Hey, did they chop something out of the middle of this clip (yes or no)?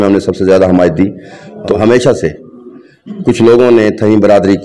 yes